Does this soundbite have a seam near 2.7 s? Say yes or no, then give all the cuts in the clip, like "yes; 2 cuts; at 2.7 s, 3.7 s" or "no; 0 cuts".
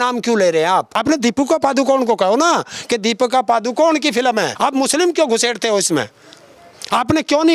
no; 2 cuts; at 0.9 s, 4.5 s